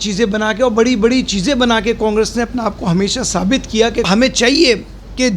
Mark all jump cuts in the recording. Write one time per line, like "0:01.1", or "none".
0:04.1